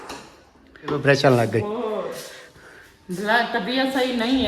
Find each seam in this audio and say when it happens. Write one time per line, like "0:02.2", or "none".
0:01.0